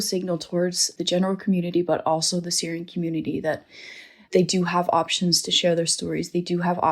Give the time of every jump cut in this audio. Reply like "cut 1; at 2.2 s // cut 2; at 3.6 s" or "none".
cut 1; at 0.9 s